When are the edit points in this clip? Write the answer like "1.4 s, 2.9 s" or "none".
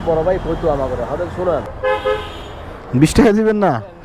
1.7 s